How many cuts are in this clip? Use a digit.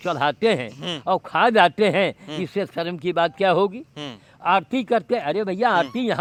0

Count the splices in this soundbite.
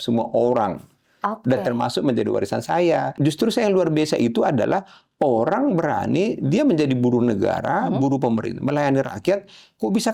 1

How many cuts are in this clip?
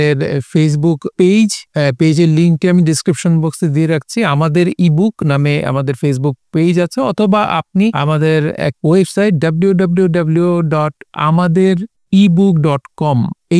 4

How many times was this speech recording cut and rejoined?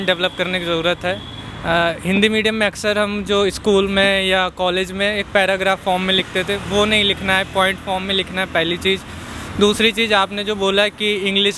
0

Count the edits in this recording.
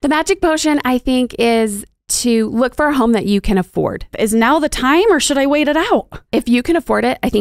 2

